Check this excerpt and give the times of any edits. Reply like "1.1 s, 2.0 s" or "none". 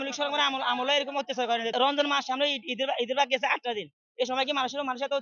1.7 s